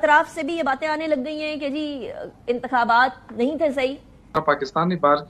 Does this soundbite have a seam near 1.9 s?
no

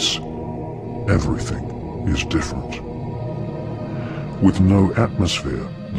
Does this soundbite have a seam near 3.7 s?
yes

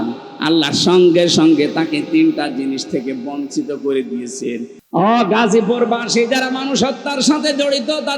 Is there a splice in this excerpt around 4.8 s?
yes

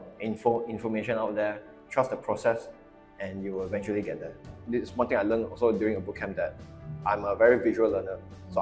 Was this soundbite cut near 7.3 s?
no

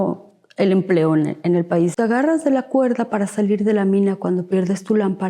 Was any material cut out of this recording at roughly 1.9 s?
yes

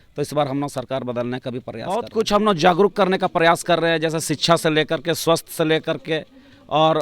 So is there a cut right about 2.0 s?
yes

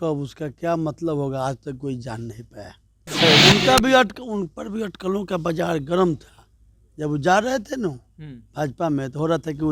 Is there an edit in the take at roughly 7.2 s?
no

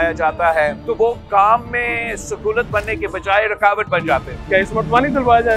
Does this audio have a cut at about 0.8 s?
yes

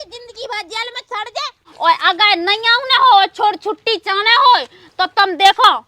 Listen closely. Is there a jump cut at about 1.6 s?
yes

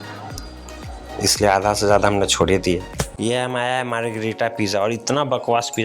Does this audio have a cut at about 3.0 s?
yes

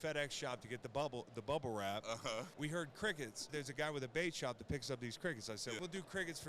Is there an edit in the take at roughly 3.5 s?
yes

